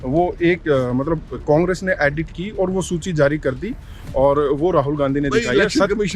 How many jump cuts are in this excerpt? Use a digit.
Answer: 0